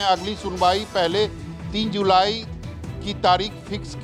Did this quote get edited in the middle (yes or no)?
no